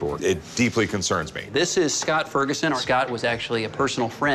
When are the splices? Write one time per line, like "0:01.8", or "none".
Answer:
0:01.4
0:02.8